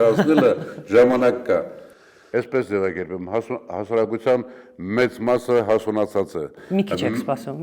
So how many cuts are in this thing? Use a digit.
1